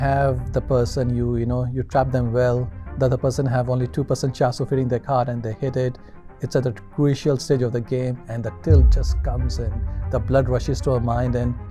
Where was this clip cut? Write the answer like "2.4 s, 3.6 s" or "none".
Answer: none